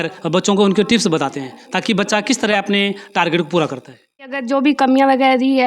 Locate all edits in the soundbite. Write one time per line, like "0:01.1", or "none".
0:04.4